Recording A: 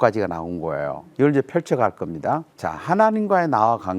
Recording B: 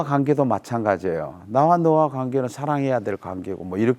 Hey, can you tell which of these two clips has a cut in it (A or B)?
A